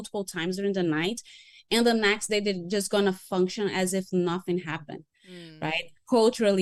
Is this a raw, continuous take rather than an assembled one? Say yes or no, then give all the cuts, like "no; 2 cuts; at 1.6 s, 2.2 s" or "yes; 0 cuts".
yes; 0 cuts